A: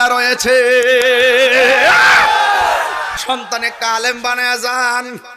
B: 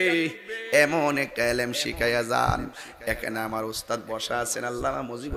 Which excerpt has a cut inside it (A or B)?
A